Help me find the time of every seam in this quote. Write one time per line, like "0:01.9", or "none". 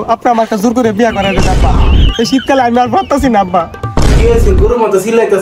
0:03.8